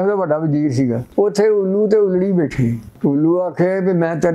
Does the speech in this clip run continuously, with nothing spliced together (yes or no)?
no